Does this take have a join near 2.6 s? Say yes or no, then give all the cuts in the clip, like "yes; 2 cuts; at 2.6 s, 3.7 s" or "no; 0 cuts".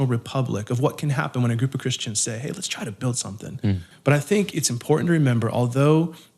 no; 1 cut; at 3.9 s